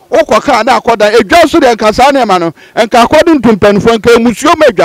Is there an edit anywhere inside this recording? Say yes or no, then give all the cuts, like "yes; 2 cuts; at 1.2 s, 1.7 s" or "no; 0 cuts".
no; 0 cuts